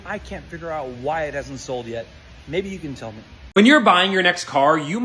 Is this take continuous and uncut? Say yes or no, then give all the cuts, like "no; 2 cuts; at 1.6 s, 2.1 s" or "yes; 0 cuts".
no; 1 cut; at 3.3 s